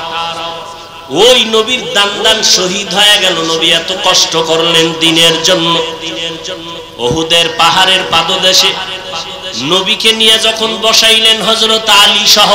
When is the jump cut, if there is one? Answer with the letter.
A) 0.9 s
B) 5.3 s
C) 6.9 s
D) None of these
A